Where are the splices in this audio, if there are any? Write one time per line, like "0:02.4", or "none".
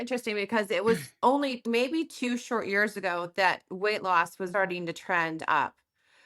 0:01.6